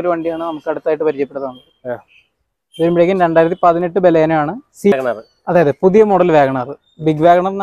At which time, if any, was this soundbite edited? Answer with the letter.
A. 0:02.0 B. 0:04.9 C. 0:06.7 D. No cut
B